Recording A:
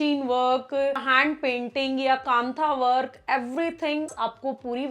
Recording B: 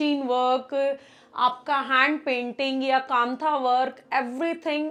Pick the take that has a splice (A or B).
A